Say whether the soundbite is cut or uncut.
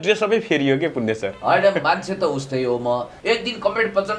cut